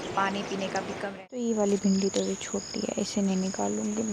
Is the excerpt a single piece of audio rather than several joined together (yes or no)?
no